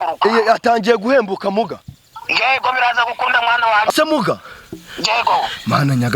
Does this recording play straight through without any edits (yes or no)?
no